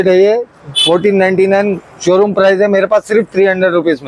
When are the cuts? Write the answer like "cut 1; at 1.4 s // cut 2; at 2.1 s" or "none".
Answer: none